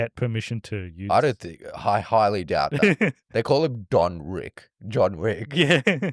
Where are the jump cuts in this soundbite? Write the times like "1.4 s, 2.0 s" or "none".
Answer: none